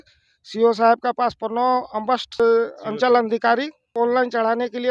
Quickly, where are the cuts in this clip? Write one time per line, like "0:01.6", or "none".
0:02.4
0:03.8